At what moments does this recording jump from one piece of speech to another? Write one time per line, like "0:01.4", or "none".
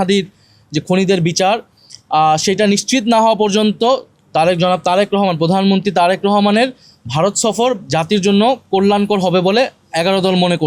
none